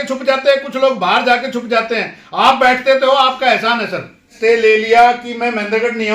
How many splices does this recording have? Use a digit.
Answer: 1